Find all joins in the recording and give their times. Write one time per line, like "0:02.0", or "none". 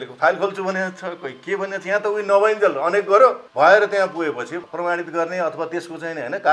0:03.4
0:04.6